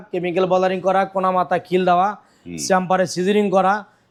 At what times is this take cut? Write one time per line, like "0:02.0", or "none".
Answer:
none